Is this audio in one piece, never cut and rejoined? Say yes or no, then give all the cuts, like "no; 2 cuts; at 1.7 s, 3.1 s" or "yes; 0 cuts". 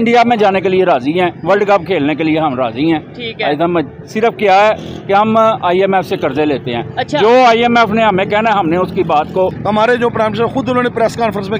no; 1 cut; at 9.5 s